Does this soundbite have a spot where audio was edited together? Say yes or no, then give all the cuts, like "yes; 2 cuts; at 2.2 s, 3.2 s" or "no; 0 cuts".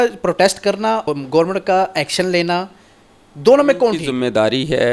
yes; 2 cuts; at 1.0 s, 4.0 s